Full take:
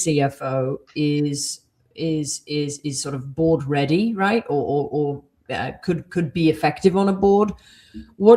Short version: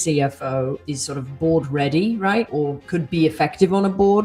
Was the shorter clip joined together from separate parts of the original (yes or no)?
yes